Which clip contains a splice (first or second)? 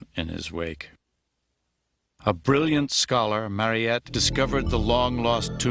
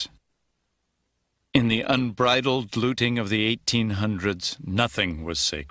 second